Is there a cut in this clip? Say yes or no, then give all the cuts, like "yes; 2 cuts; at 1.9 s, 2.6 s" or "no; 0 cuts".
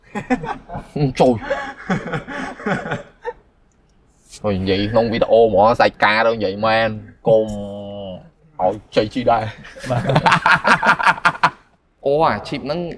yes; 1 cut; at 11.7 s